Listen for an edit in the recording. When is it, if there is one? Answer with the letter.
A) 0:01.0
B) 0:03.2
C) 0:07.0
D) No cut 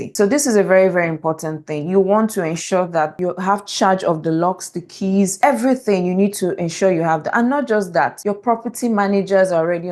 B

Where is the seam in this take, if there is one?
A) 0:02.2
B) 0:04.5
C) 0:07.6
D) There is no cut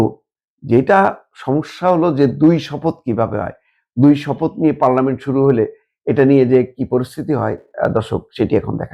D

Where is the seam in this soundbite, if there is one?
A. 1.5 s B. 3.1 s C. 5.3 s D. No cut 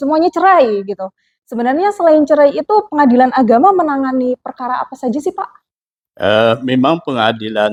D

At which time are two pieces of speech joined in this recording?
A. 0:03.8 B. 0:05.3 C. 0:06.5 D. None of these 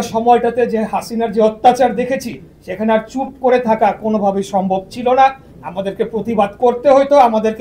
D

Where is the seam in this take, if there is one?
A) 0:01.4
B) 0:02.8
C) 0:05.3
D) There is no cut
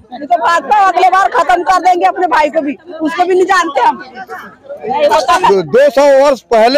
C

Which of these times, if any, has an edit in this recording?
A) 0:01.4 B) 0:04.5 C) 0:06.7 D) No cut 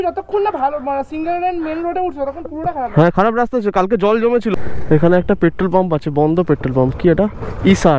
B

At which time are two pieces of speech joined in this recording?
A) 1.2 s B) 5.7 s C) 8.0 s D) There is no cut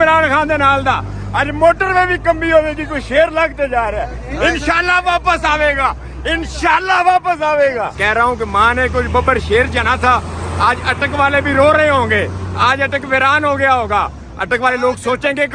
C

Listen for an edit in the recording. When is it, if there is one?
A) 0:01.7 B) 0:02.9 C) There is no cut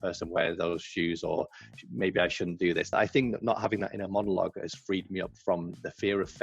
B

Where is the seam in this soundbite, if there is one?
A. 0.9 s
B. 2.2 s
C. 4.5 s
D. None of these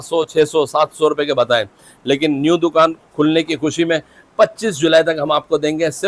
D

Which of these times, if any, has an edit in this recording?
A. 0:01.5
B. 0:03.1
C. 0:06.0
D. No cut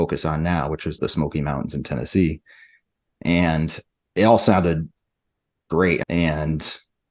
C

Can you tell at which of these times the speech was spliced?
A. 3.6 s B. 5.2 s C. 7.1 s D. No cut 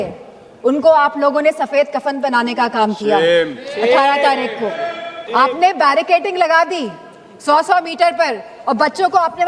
B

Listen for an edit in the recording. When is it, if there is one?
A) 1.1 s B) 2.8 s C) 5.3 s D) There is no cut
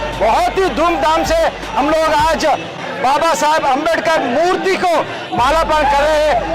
B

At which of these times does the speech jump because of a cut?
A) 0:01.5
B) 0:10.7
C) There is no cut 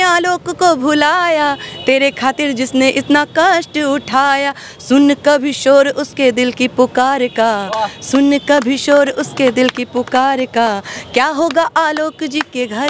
C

